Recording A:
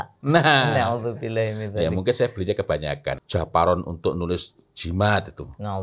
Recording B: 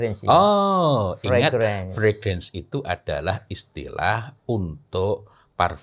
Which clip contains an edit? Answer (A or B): A